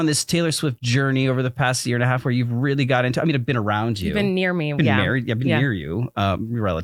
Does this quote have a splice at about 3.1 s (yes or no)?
no